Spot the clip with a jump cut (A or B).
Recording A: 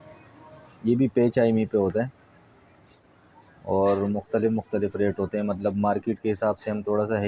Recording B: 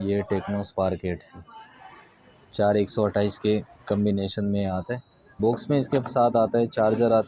B